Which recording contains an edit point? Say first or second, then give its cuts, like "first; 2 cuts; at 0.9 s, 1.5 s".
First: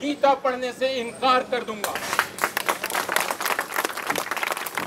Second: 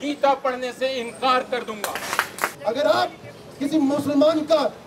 second; 1 cut; at 2.5 s